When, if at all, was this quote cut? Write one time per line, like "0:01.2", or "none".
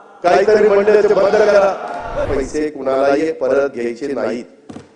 0:02.3